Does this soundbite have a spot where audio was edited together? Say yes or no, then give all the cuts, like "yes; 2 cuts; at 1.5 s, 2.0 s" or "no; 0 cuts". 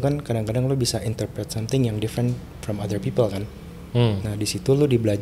no; 0 cuts